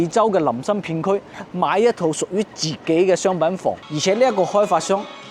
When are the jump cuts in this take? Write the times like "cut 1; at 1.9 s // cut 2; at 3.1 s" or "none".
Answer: cut 1; at 3.8 s